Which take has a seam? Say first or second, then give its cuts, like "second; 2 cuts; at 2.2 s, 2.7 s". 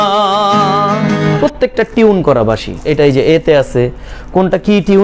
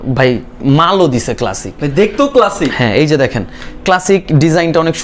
first; 2 cuts; at 1.4 s, 2.8 s